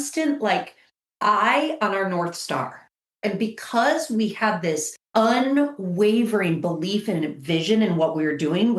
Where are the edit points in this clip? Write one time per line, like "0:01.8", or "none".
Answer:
0:03.0
0:05.0